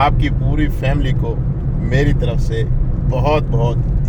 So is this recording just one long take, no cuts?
yes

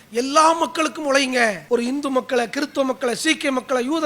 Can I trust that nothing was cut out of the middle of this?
no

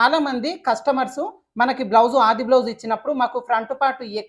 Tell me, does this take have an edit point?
no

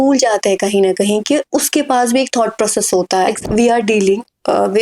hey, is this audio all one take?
no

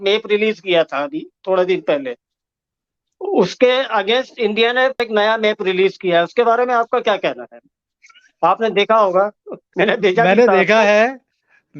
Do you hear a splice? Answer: no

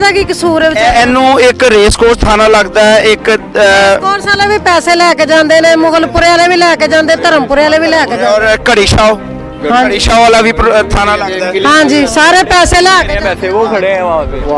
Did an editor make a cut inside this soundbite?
no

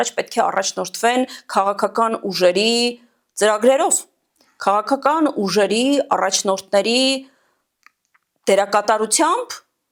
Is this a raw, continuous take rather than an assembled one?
yes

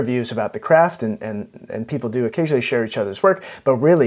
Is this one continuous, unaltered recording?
no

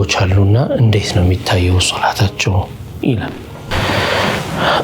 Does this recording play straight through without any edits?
no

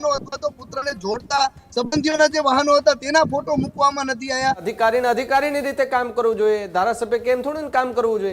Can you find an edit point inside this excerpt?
yes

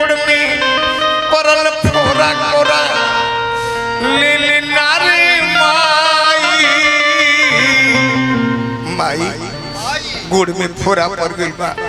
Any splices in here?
no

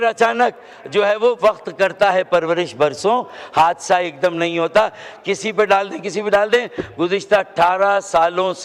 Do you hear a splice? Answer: no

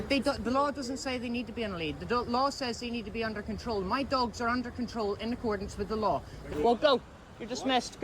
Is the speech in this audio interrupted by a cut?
yes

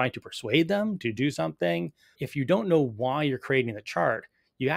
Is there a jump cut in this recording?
yes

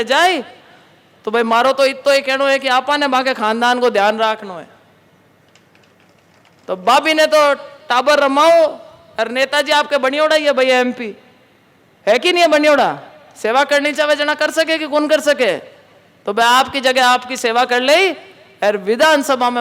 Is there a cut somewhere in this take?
no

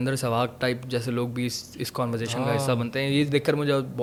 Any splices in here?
no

